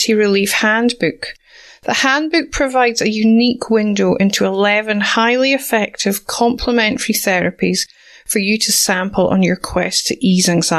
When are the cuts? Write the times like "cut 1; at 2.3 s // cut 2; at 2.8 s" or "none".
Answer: none